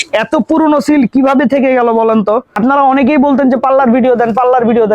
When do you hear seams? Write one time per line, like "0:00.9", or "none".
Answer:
0:02.5